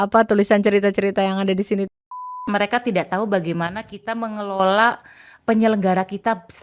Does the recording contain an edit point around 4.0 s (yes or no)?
no